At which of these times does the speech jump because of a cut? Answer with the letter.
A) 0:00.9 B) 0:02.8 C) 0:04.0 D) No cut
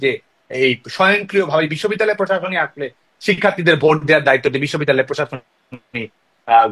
D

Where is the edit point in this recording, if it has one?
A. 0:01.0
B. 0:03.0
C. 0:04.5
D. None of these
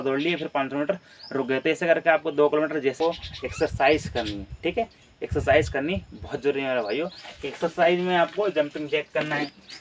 B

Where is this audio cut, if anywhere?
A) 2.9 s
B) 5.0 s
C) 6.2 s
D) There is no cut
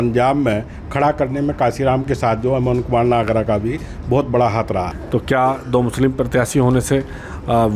B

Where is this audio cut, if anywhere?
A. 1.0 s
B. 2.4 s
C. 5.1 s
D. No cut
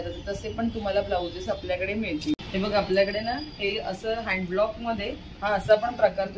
B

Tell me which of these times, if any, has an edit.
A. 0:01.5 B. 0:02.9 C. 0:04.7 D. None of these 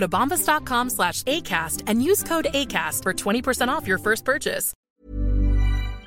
C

